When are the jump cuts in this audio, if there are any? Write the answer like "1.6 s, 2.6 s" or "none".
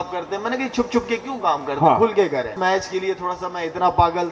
2.5 s